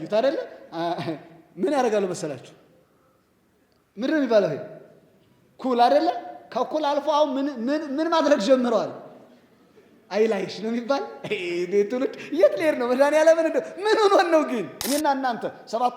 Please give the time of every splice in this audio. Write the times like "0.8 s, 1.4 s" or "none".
14.8 s